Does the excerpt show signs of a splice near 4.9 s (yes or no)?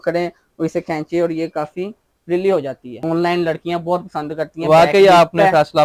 no